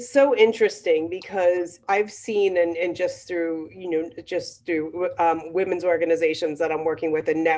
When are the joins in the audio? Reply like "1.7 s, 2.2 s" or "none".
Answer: 1.8 s